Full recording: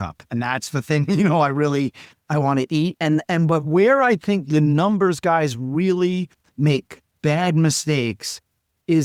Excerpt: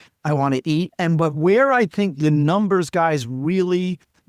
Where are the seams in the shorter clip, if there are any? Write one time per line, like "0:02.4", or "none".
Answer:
0:00.9